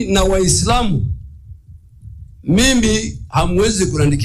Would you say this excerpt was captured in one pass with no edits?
yes; 0 cuts

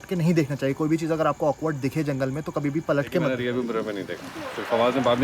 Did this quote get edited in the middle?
yes; 1 cut; at 3.3 s

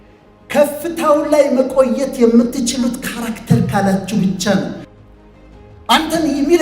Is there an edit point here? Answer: yes; 1 cut; at 4.9 s

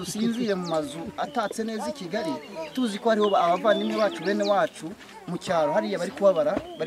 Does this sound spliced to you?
no; 0 cuts

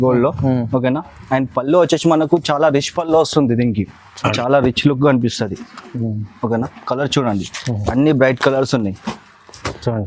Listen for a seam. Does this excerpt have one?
yes; 1 cut; at 4.4 s

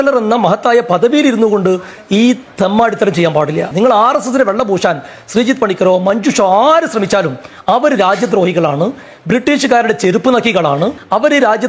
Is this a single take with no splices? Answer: yes; 0 cuts

